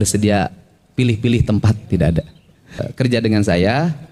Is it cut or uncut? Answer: cut